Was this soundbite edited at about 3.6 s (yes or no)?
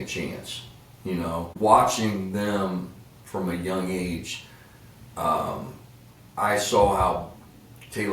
no